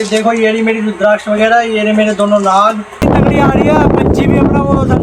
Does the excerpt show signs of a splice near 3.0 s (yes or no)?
yes